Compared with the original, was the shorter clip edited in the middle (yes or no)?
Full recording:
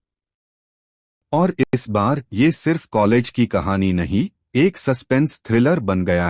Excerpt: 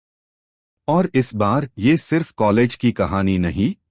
yes